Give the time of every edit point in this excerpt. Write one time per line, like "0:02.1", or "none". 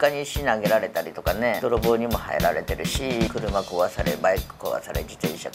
0:01.6
0:03.3